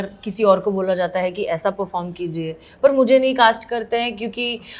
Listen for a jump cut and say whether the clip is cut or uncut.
uncut